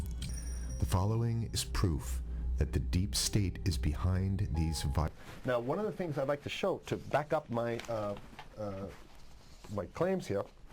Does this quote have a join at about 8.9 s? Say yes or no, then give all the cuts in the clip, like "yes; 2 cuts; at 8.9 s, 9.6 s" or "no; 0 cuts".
no; 1 cut; at 5.1 s